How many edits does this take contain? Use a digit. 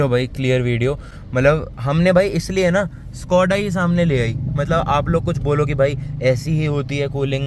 0